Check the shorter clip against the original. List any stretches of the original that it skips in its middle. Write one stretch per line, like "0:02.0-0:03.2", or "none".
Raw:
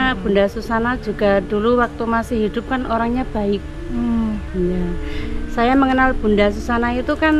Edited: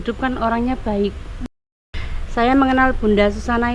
0:04.0-0:04.7